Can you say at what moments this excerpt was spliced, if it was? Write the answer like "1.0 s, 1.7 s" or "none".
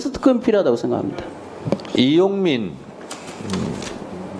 1.9 s